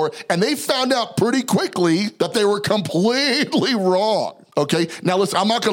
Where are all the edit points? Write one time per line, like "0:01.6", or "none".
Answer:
0:02.1
0:04.4